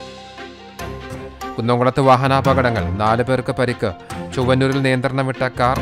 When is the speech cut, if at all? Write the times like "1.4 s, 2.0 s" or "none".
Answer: none